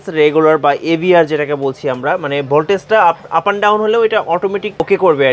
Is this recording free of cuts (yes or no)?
yes